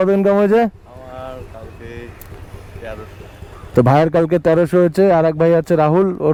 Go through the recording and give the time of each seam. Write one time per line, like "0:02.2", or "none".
none